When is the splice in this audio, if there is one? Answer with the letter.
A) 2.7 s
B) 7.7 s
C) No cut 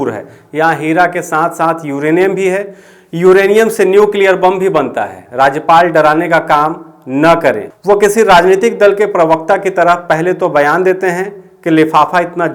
B